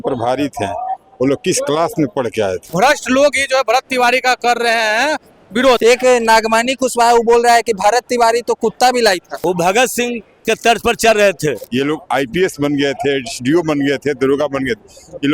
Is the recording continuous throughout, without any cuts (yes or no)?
no